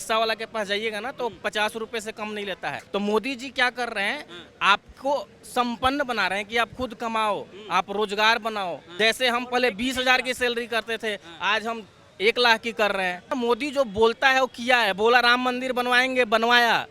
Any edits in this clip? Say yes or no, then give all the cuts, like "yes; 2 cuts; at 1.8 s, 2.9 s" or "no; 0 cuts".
yes; 3 cuts; at 2.8 s, 8.8 s, 13.3 s